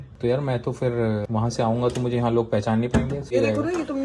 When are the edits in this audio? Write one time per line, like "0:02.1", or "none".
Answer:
0:01.2
0:03.3